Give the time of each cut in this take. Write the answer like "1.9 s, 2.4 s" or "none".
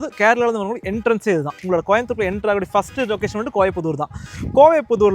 1.5 s